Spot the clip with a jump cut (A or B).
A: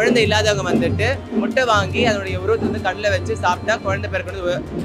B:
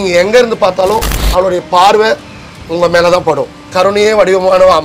B